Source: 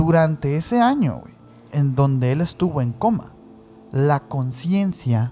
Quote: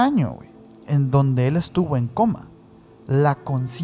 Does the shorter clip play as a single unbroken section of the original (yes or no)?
yes